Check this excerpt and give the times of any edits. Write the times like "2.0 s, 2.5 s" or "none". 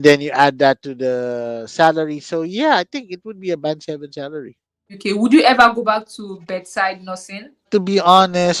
5.0 s, 7.7 s